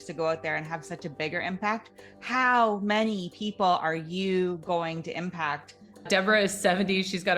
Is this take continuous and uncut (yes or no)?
no